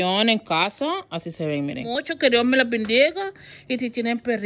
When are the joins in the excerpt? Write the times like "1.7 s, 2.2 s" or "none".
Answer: 2.1 s